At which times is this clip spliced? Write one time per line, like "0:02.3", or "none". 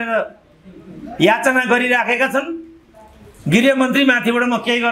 none